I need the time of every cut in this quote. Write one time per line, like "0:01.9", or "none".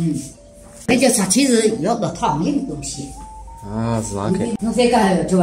0:00.9
0:04.5